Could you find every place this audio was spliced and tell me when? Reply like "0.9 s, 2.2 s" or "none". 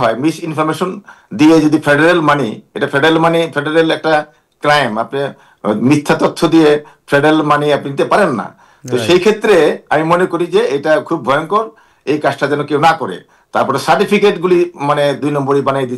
none